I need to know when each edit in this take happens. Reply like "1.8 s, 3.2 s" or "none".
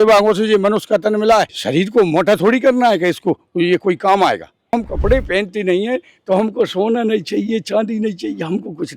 1.6 s, 4.7 s